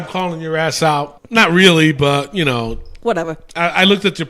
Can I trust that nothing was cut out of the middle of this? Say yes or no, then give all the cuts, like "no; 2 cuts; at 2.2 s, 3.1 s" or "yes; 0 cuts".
no; 1 cut; at 1.2 s